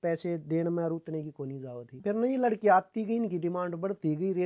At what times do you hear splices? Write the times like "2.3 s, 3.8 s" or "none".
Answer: 1.9 s